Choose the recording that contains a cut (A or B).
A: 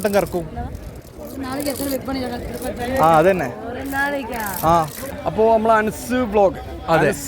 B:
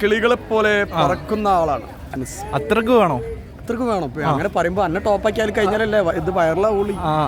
A